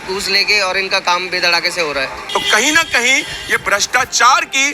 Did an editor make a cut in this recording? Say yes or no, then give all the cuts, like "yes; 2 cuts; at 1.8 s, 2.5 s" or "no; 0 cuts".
yes; 1 cut; at 2.1 s